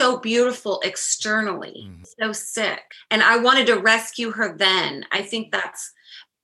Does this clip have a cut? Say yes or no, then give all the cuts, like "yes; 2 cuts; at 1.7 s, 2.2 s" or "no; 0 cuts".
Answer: yes; 2 cuts; at 2.1 s, 2.9 s